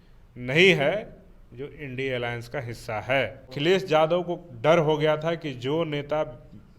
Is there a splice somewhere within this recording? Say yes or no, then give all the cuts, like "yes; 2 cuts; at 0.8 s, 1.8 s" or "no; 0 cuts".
yes; 1 cut; at 3.5 s